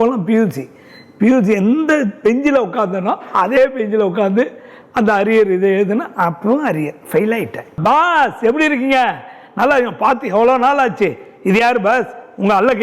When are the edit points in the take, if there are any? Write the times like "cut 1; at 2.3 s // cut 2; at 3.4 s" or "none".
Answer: cut 1; at 7.8 s